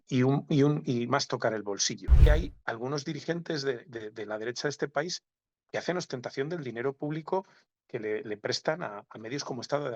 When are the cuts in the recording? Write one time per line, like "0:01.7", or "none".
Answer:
0:02.3